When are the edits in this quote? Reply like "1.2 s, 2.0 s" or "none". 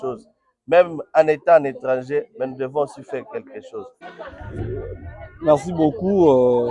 4.0 s